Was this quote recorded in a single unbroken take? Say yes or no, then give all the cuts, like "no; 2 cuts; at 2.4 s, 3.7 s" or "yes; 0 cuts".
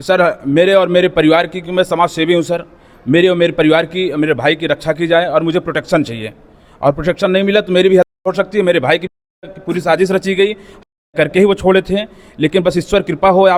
yes; 0 cuts